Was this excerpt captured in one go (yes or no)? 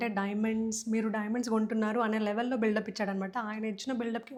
yes